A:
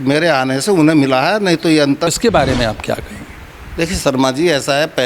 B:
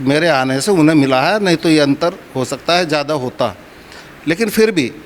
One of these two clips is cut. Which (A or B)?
A